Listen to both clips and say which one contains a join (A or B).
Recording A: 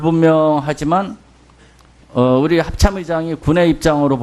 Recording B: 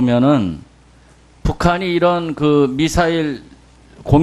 B